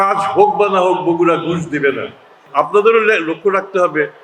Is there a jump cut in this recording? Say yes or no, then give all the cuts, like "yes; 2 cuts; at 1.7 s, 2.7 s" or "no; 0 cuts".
yes; 1 cut; at 2.4 s